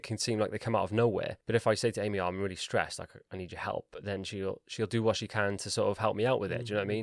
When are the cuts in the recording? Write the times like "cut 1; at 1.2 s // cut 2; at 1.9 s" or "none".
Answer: cut 1; at 1.4 s